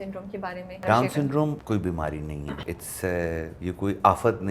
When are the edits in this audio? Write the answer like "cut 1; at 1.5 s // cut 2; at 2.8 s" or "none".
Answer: cut 1; at 0.8 s // cut 2; at 1.6 s // cut 3; at 2.6 s // cut 4; at 3.5 s